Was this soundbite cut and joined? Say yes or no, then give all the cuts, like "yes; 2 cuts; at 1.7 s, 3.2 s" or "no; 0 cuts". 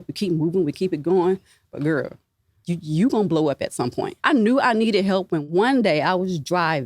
yes; 3 cuts; at 2.5 s, 4.1 s, 5.4 s